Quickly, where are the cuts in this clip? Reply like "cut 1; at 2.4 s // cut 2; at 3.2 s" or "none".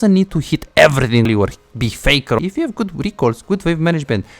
cut 1; at 1.3 s // cut 2; at 2.4 s